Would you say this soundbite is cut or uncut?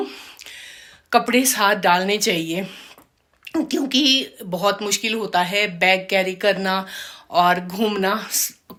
uncut